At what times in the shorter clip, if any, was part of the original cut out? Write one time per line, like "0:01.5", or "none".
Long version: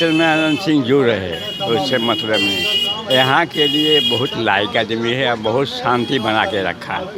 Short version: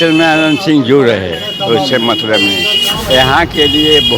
none